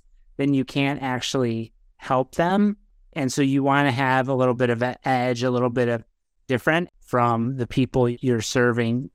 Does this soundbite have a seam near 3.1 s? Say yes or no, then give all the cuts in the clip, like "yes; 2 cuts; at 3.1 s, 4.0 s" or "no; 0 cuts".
yes; 3 cuts; at 3.1 s, 6.9 s, 8.1 s